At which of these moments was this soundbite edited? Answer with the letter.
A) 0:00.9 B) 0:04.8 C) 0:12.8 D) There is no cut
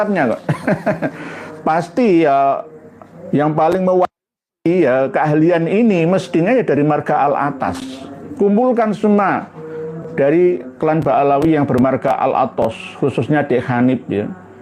D